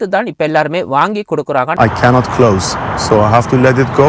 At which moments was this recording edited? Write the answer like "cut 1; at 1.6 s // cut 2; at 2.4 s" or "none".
cut 1; at 1.8 s